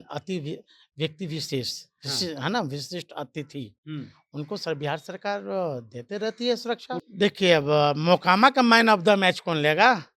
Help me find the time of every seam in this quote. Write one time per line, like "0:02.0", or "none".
0:07.0